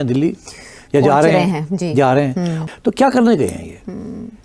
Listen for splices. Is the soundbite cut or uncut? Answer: cut